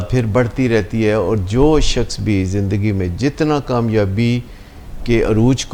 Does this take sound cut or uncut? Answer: uncut